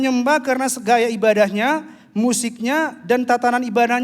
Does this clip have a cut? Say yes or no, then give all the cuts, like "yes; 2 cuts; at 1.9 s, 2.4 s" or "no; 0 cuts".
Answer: no; 0 cuts